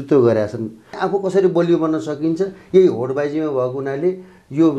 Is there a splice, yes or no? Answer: yes